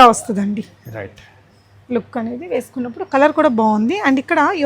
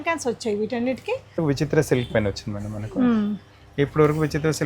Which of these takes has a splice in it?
second; 1 cut; at 1.4 s

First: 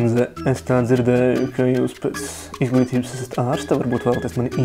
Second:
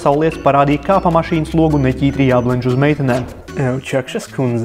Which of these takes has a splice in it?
second; 1 cut; at 3.4 s

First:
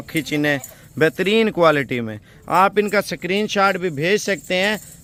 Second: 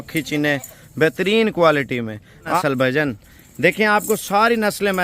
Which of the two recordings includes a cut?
second; 1 cut; at 2.6 s

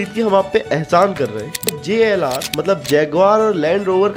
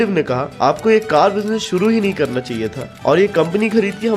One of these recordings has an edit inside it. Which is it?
first; 1 cut; at 1.7 s

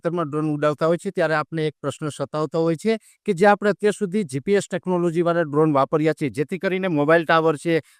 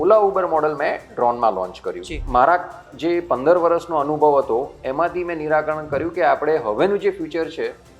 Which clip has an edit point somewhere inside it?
second; 1 cut; at 2.2 s

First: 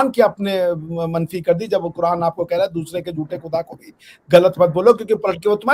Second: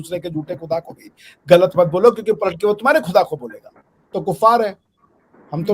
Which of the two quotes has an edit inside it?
second; 1 cut; at 4.1 s

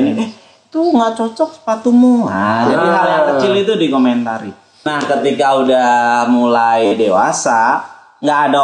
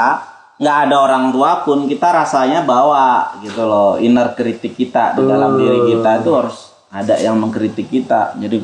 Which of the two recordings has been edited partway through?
first; 1 cut; at 4.9 s

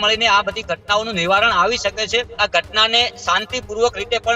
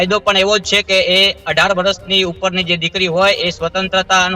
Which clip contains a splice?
first; 1 cut; at 2.3 s

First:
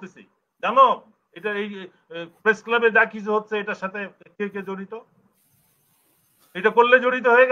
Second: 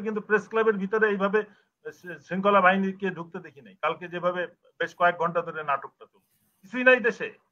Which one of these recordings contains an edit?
second; 1 cut; at 6.6 s

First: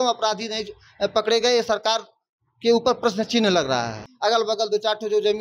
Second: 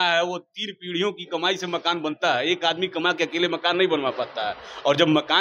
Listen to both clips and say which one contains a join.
first; 1 cut; at 4.0 s

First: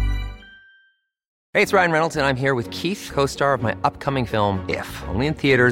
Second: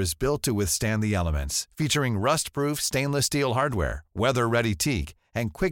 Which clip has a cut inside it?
first; 1 cut; at 1.3 s

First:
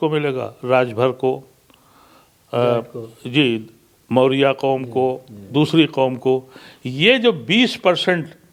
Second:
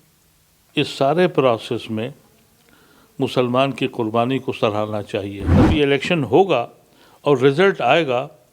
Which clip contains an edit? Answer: second; 1 cut; at 5.6 s

